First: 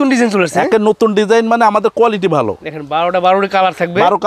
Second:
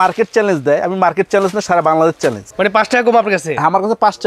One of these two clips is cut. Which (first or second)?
second